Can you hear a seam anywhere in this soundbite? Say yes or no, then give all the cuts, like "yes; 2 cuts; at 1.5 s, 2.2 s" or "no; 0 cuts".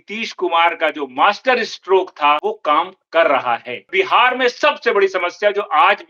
yes; 2 cuts; at 2.4 s, 3.9 s